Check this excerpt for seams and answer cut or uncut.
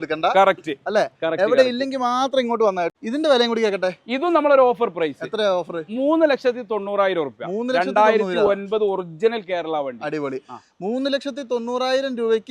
cut